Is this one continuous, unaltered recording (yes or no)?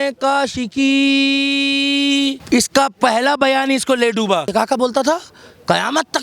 no